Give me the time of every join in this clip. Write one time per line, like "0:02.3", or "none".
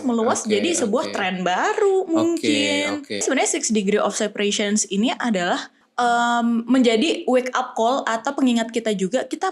0:03.2
0:05.8